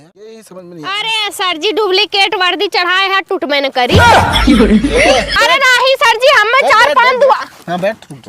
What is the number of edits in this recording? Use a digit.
1